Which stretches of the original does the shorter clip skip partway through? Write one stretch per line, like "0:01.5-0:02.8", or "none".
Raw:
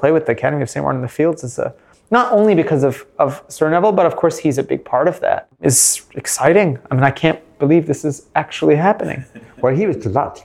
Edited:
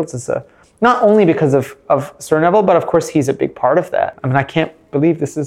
0:05.5-0:06.9